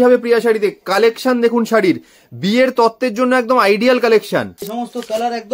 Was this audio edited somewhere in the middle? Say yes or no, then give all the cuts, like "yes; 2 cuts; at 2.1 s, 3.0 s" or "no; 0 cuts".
yes; 1 cut; at 4.6 s